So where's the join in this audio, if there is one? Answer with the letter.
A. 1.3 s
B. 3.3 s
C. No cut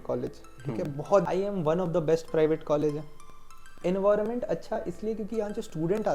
A